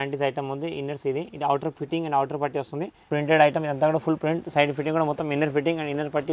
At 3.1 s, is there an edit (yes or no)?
yes